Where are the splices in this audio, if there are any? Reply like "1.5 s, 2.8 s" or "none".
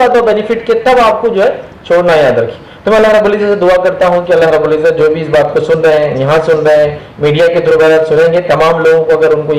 none